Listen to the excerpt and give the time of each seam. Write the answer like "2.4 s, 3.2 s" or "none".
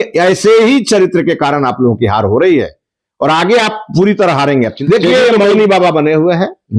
4.8 s